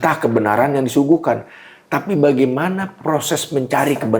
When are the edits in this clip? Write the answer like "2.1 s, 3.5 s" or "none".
none